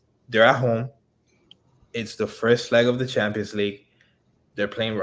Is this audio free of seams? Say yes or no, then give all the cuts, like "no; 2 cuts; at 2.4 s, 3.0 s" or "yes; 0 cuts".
yes; 0 cuts